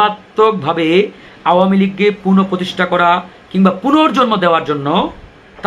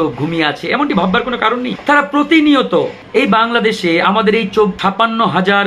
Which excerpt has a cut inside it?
second; 3 cuts; at 1.8 s, 3.0 s, 4.8 s

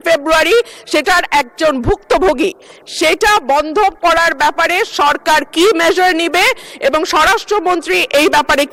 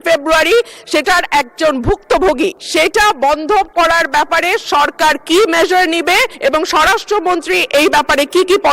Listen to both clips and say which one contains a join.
second; 2 cuts; at 2.6 s, 6.3 s

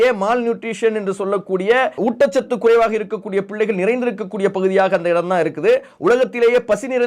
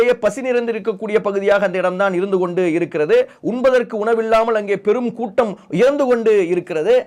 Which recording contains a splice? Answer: first; 1 cut; at 2.0 s

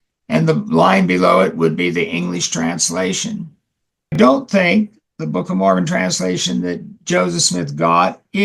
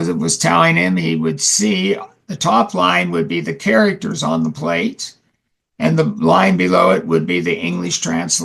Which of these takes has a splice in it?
first; 1 cut; at 4.1 s

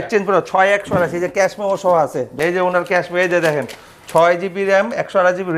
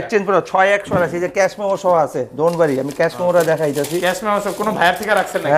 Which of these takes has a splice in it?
first; 1 cut; at 2.4 s

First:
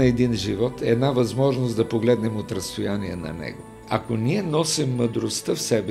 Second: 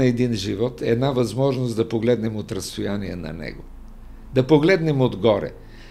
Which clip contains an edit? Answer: first; 1 cut; at 3.8 s

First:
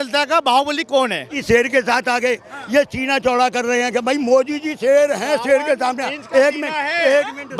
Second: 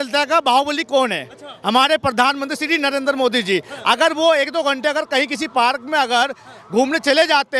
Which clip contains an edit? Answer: first; 1 cut; at 1.4 s

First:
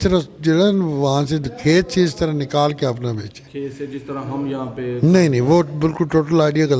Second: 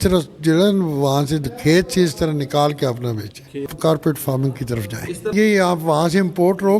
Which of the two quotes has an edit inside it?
second; 2 cuts; at 3.7 s, 5.3 s

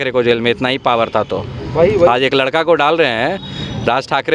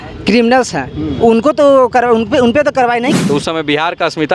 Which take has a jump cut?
second; 1 cut; at 3.2 s

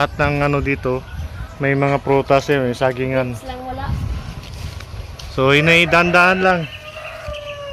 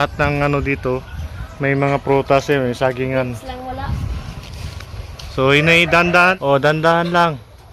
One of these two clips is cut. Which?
second; 1 cut; at 6.4 s

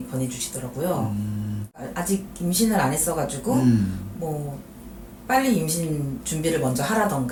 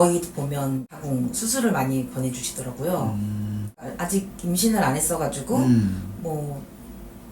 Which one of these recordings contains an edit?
second; 1 cut; at 0.9 s

